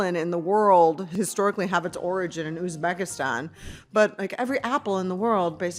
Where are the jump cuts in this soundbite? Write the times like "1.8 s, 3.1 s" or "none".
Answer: 1.1 s